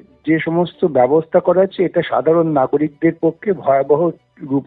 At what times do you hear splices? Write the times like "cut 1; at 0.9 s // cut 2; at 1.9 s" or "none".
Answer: none